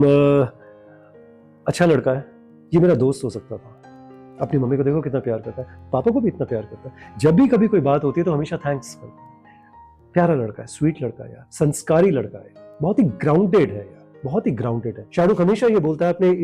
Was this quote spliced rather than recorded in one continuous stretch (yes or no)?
yes